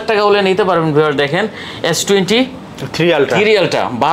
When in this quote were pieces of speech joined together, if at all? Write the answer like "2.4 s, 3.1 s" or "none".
none